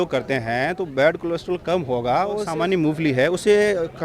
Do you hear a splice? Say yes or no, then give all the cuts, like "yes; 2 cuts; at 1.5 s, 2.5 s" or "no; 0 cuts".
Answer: yes; 1 cut; at 2.5 s